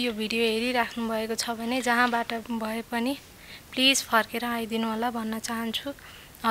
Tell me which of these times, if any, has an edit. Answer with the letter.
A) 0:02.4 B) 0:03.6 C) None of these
A